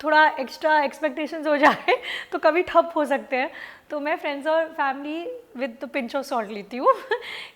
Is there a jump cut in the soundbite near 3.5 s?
no; 0 cuts

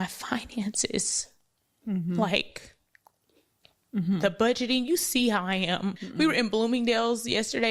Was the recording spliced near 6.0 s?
yes; 1 cut; at 6.0 s

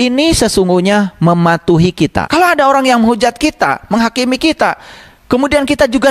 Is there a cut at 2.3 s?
yes; 1 cut; at 2.3 s

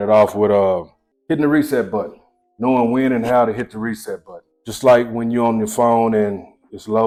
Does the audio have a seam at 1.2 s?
no; 0 cuts

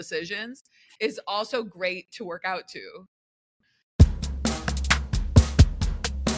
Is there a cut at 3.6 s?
yes; 1 cut; at 3.6 s

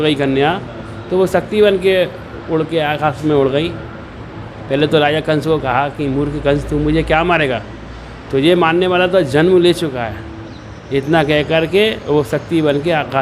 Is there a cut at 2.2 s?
no; 0 cuts

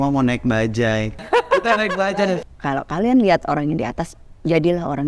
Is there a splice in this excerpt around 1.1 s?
yes; 2 cuts; at 1.1 s, 2.4 s

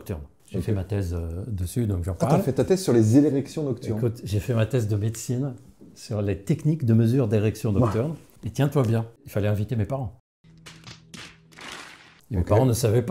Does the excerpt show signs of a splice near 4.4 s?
no; 0 cuts

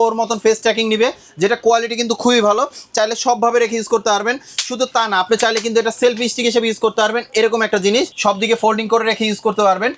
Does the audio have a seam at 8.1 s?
yes; 1 cut; at 8.1 s

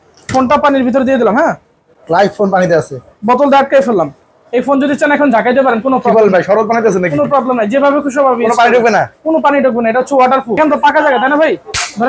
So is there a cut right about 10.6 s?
yes; 1 cut; at 10.6 s

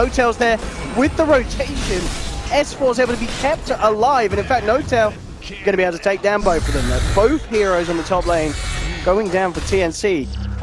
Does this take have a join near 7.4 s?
no; 1 cut; at 5.7 s

